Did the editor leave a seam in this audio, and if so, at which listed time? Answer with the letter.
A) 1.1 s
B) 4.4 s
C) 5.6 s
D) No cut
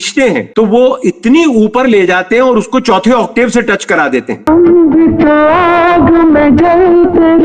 B